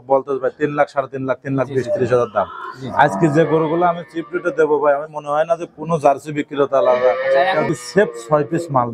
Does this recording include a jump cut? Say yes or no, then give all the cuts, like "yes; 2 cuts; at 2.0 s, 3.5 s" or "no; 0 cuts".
yes; 1 cut; at 7.7 s